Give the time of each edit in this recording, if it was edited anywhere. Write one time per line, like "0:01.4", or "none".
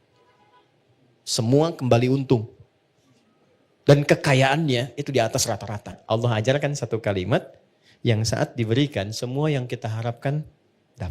0:06.0